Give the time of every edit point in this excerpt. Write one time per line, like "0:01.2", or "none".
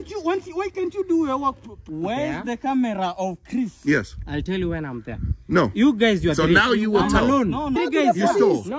0:01.7
0:07.8